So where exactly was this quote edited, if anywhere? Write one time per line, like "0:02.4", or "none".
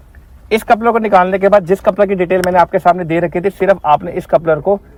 none